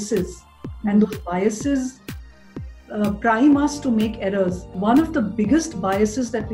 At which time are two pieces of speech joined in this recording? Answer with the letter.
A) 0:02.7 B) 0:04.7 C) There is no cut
B